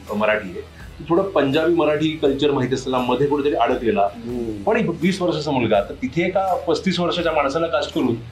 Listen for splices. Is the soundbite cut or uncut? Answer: uncut